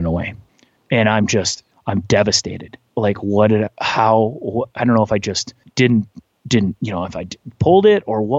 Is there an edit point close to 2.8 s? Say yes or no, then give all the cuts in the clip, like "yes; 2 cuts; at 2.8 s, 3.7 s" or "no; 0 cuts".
yes; 1 cut; at 2.8 s